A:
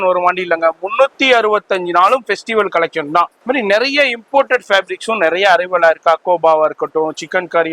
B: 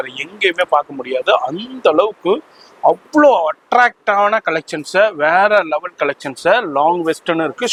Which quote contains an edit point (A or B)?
A